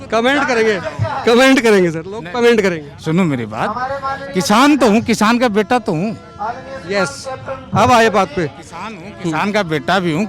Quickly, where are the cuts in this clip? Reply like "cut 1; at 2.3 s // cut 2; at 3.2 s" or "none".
none